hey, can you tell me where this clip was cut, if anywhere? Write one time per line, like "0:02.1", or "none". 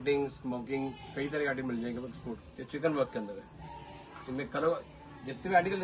0:02.4